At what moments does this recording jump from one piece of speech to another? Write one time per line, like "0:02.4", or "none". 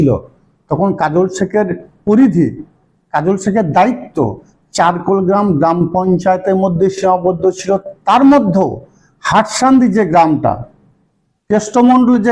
none